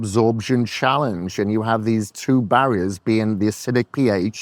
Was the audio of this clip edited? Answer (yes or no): no